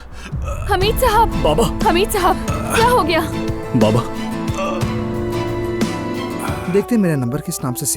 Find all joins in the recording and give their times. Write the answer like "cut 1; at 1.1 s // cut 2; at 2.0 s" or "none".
cut 1; at 6.5 s